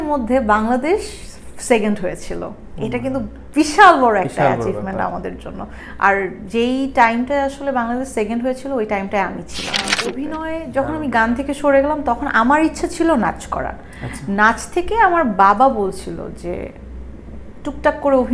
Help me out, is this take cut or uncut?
cut